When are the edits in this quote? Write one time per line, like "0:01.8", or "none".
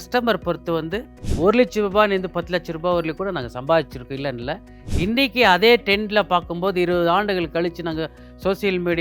0:04.7